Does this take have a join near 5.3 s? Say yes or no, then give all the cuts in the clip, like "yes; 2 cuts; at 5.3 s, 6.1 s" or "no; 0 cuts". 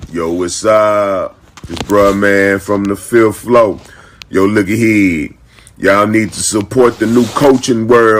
no; 0 cuts